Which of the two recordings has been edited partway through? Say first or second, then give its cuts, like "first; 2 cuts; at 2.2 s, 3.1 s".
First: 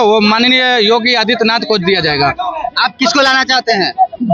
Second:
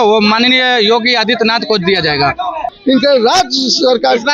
second; 1 cut; at 2.7 s